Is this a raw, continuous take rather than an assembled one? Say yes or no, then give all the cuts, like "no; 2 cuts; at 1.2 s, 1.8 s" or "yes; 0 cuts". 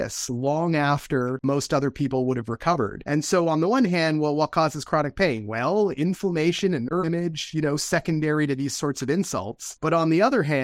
no; 2 cuts; at 1.4 s, 3.0 s